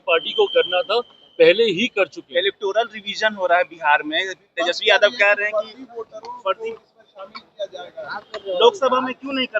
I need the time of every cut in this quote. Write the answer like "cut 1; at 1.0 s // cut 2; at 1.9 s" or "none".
none